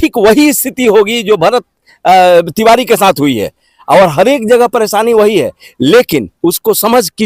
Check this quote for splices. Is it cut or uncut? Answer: uncut